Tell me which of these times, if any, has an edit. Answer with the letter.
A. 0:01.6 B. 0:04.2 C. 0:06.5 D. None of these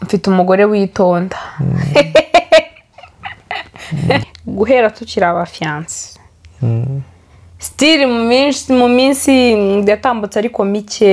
B